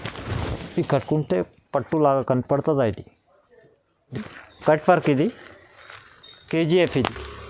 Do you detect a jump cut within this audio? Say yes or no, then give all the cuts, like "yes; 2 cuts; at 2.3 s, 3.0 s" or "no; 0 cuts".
yes; 1 cut; at 4.2 s